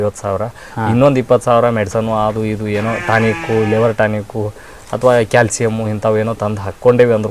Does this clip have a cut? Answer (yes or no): no